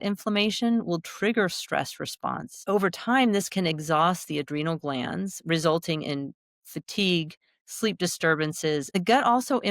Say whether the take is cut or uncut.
cut